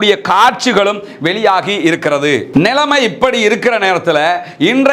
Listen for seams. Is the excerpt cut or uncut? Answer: cut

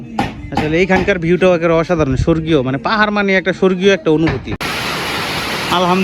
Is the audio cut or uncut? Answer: cut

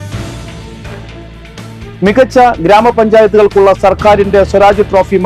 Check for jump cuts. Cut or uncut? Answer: cut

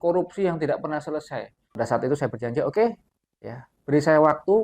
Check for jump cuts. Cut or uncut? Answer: cut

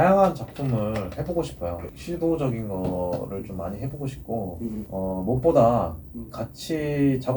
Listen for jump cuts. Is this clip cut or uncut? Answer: cut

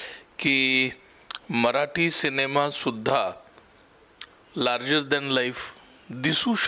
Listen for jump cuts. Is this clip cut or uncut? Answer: uncut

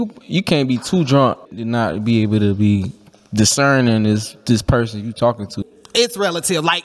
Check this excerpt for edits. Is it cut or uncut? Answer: cut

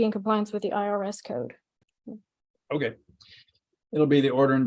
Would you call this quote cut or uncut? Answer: uncut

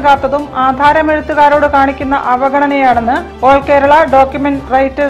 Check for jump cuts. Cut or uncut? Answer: uncut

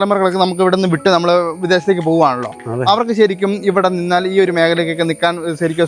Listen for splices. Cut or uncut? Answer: uncut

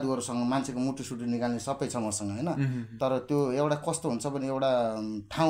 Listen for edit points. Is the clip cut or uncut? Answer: uncut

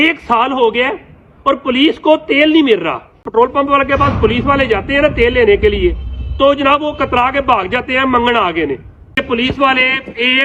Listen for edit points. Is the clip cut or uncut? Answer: cut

